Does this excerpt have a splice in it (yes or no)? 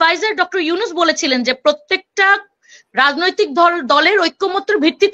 no